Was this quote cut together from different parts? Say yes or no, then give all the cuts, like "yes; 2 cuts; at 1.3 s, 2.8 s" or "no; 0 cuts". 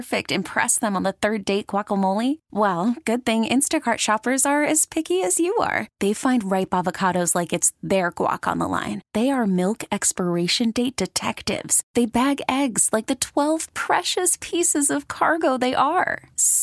no; 0 cuts